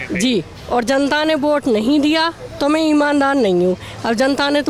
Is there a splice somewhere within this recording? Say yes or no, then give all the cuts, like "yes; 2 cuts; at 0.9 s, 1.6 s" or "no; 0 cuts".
no; 0 cuts